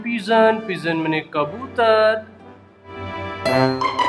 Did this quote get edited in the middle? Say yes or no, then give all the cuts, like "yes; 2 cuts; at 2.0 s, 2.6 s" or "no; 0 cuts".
yes; 1 cut; at 3.0 s